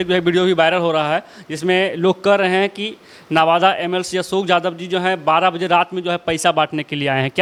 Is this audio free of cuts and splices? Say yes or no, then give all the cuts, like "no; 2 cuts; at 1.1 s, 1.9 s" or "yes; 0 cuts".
yes; 0 cuts